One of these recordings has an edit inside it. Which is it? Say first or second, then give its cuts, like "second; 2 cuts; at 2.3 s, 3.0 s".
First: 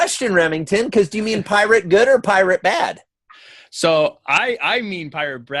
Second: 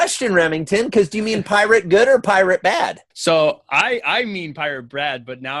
second; 1 cut; at 3.1 s